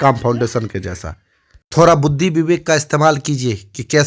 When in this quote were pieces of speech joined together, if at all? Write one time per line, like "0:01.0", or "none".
none